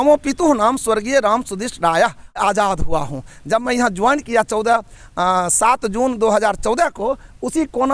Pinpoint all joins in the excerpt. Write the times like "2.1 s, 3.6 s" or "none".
2.4 s